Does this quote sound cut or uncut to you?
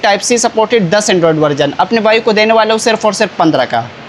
uncut